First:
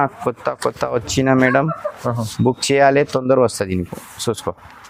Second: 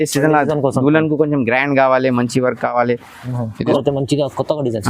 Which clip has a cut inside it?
second; 1 cut; at 3.6 s

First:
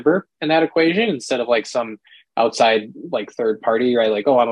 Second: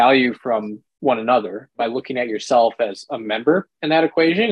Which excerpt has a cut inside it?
second; 1 cut; at 1.6 s

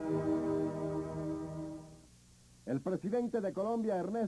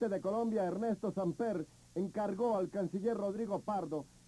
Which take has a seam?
second; 1 cut; at 3.3 s

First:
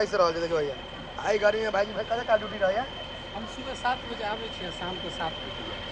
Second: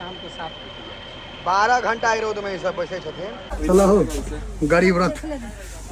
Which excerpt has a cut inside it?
second; 1 cut; at 3.5 s

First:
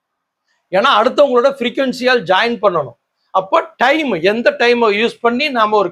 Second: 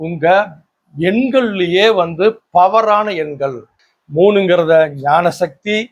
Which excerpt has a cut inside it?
second; 1 cut; at 3.7 s

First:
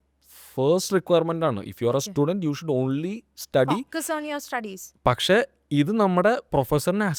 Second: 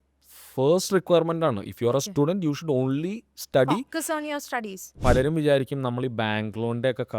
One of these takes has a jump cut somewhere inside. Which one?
second; 1 cut; at 5.0 s

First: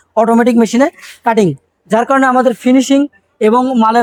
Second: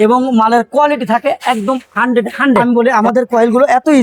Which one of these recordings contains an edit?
second; 1 cut; at 2.6 s

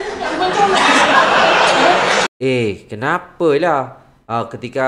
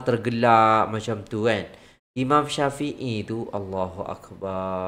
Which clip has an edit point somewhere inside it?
first; 1 cut; at 2.2 s

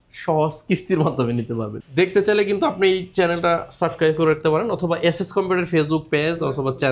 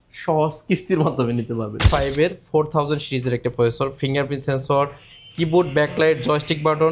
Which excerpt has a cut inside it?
second; 1 cut; at 1.7 s

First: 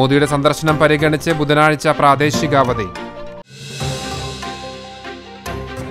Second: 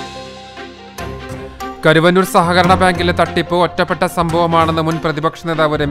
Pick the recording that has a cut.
second; 1 cut; at 1.4 s

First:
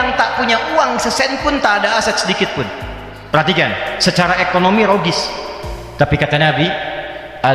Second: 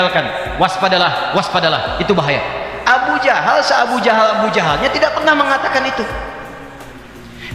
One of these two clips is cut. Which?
second; 1 cut; at 2.7 s

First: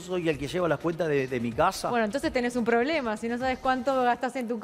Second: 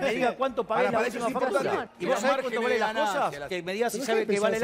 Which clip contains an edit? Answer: second; 2 cuts; at 1.9 s, 3.5 s

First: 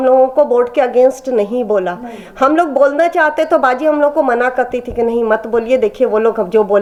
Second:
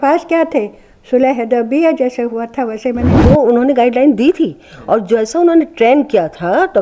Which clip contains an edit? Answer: second; 1 cut; at 3.1 s

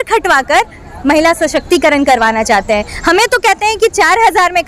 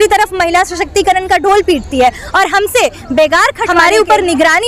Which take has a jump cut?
second; 1 cut; at 3.6 s

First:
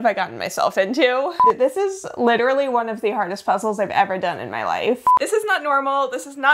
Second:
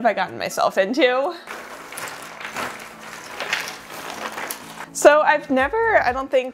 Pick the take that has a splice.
first; 2 cuts; at 1.4 s, 5.1 s

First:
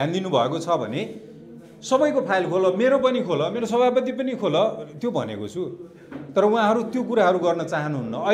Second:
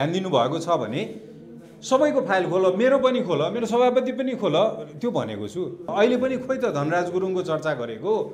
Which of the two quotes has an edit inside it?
second; 1 cut; at 5.8 s

